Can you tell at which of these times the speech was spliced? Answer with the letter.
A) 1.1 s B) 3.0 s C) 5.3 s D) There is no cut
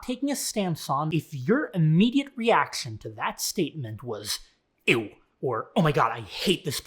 A